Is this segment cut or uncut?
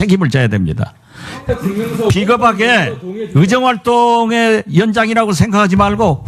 uncut